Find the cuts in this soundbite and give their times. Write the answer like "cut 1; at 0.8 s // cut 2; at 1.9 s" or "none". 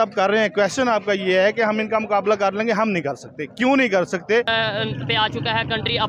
cut 1; at 4.5 s